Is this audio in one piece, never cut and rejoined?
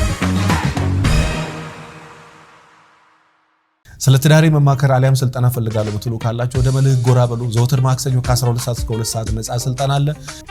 no; 1 cut; at 3.8 s

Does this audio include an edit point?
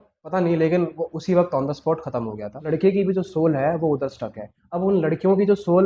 yes; 1 cut; at 2.6 s

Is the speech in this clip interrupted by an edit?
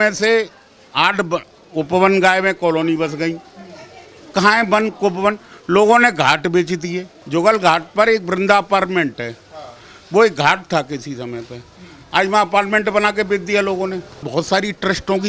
yes; 2 cuts; at 7.1 s, 14.3 s

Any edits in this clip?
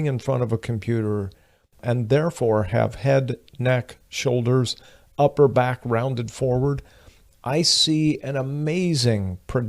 yes; 1 cut; at 1.8 s

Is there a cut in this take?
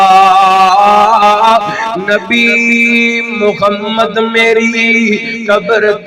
no; 0 cuts

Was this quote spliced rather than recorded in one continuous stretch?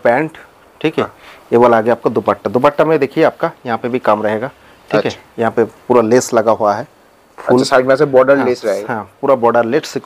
no; 0 cuts

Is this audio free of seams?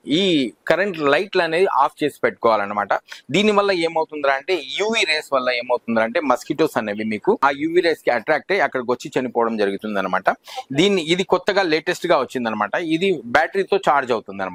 yes; 0 cuts

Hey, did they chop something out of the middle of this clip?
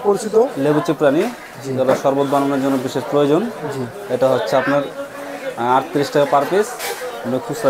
no; 0 cuts

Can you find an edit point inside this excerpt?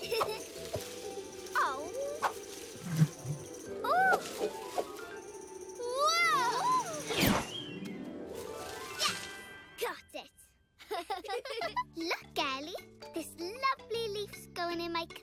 no; 0 cuts

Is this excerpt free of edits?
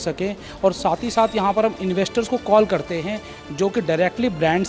yes; 0 cuts

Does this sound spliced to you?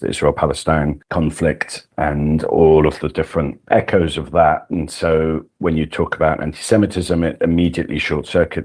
yes; 1 cut; at 1.0 s

